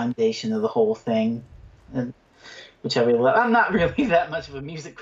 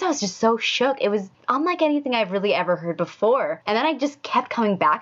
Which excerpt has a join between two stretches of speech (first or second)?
second